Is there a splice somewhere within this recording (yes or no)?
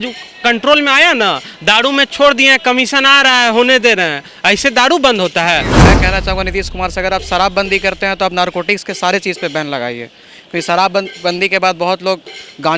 yes